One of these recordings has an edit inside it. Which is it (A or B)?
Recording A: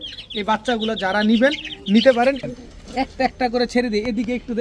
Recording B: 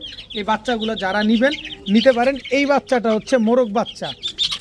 A